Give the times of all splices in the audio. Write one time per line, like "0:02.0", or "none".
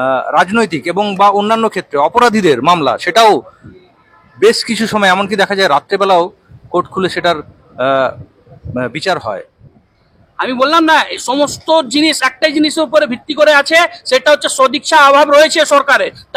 0:09.7